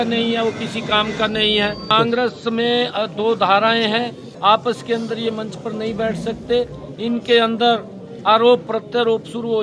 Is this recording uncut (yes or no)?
no